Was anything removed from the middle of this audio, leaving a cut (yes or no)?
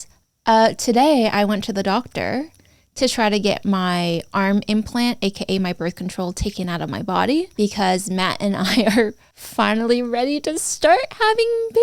no